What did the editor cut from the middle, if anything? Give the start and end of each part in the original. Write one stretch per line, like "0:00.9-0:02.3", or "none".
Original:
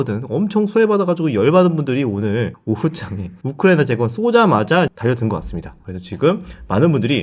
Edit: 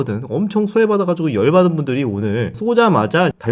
0:02.6-0:04.1